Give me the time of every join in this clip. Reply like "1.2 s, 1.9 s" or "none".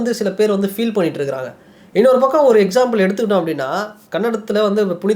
none